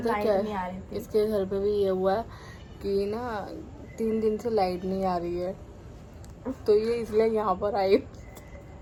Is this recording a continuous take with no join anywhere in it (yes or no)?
yes